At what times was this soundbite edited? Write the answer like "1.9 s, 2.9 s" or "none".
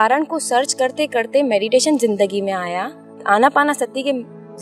3.2 s